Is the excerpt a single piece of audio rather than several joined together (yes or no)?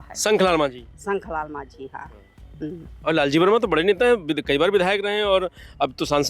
yes